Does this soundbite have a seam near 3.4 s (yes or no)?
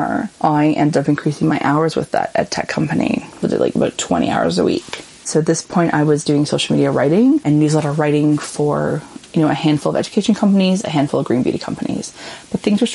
yes